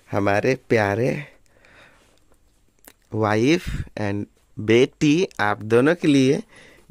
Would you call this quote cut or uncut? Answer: uncut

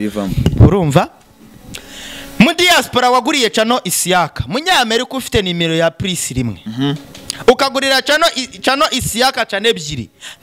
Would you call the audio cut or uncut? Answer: uncut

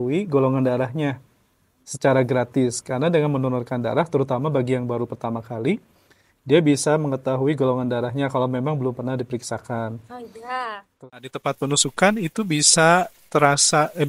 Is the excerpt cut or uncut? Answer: cut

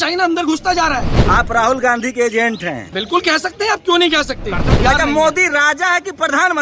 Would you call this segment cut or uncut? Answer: cut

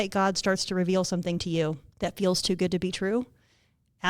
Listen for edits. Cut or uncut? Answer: cut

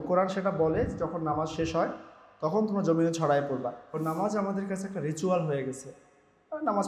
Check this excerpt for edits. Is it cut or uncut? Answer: cut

